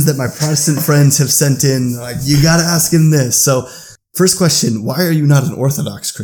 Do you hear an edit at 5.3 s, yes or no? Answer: no